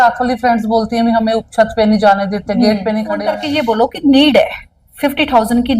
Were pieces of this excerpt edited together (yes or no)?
yes